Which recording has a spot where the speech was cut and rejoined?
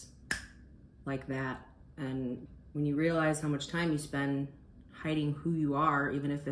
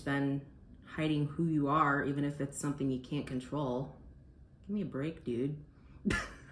first; 1 cut; at 2.6 s

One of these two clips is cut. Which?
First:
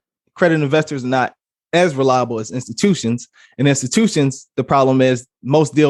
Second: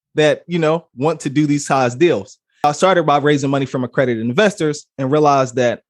second; 1 cut; at 2.6 s

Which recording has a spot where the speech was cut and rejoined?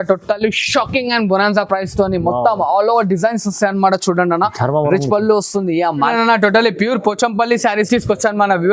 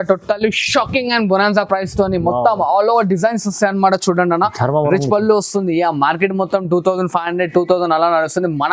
first; 1 cut; at 6.1 s

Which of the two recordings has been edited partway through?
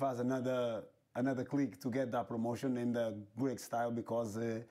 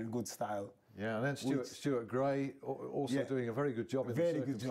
first; 1 cut; at 2.7 s

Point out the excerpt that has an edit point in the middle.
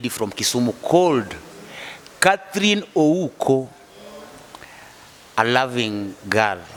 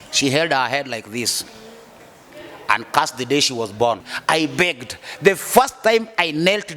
second; 1 cut; at 4.1 s

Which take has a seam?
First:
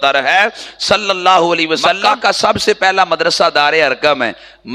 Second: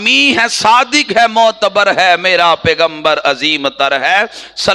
first; 1 cut; at 2.0 s

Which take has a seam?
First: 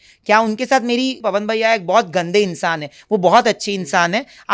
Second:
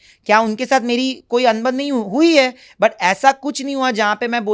first; 1 cut; at 1.2 s

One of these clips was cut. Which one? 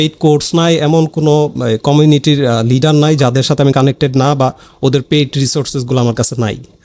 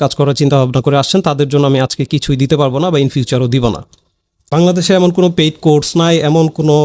second; 1 cut; at 4.4 s

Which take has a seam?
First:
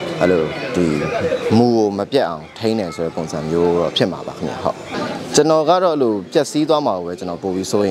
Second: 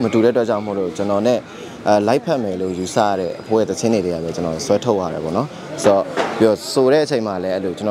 first; 1 cut; at 4.9 s

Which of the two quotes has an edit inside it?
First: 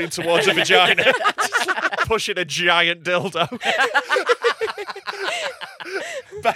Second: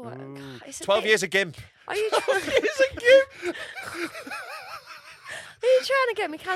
first; 1 cut; at 2.0 s

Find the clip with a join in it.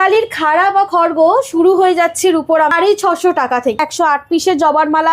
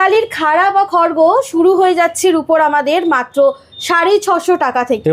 first; 2 cuts; at 2.7 s, 3.8 s

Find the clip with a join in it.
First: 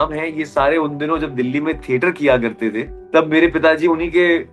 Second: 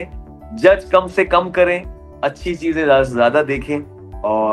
first; 1 cut; at 2.9 s

